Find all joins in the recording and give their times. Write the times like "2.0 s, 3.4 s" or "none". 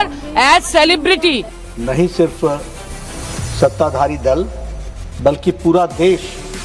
1.5 s